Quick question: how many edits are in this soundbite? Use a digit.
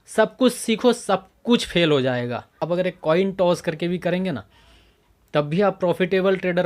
1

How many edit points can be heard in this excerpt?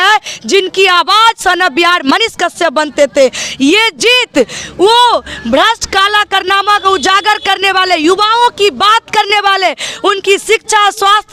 0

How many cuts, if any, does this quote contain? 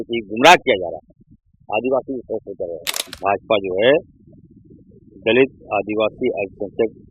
1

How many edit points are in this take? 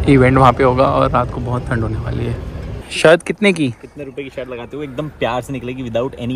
1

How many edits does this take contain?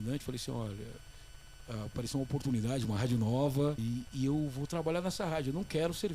1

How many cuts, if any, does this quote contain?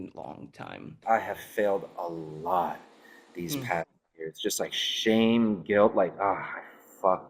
1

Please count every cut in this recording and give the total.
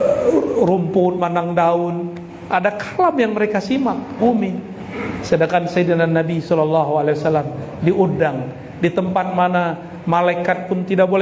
1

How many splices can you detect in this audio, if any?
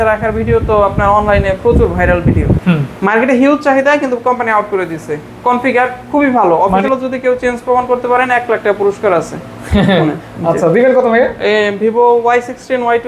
2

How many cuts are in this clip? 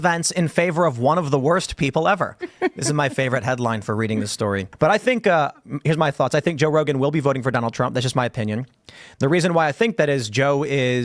1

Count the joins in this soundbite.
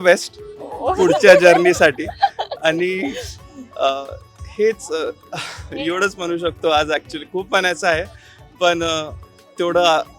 0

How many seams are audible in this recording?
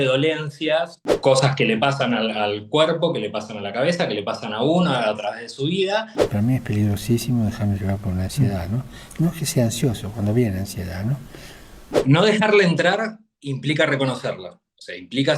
3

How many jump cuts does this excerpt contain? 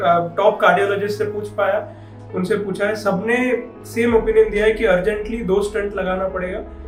0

